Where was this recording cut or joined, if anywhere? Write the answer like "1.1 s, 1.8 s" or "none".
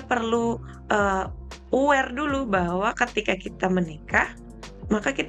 none